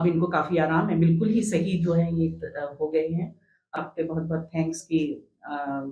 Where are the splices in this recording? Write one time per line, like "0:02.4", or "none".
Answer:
0:03.8